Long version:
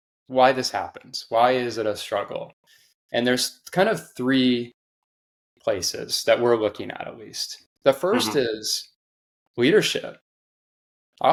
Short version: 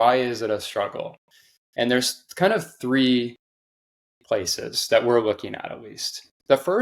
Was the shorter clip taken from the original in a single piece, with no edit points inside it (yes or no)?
yes